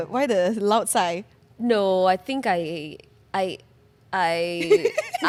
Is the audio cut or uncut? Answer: uncut